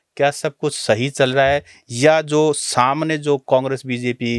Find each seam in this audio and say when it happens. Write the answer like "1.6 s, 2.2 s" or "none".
none